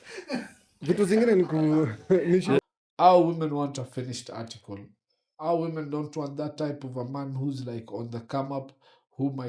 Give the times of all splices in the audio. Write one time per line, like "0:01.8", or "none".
0:02.6